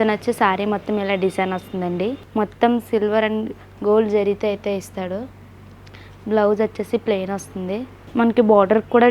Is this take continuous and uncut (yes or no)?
no